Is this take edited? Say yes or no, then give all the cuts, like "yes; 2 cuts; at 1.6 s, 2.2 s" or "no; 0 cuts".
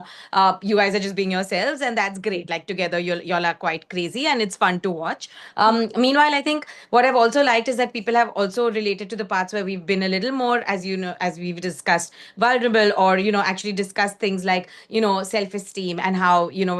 no; 0 cuts